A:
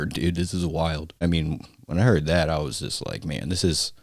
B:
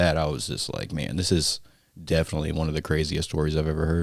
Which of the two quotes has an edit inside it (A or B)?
A